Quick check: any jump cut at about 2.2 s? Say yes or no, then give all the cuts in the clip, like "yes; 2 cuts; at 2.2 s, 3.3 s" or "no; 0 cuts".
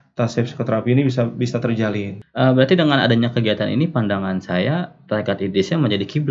yes; 1 cut; at 2.2 s